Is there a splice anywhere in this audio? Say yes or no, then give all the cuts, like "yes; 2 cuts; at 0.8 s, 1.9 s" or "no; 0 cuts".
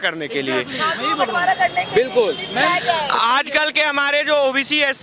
no; 0 cuts